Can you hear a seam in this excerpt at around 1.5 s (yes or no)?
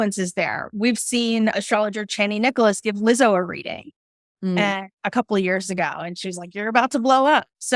yes